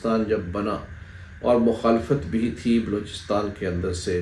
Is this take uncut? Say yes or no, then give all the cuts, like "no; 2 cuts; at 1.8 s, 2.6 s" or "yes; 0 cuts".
yes; 0 cuts